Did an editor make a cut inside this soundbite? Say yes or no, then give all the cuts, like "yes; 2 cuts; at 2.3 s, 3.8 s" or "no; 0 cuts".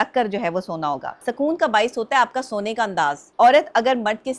yes; 2 cuts; at 1.3 s, 3.2 s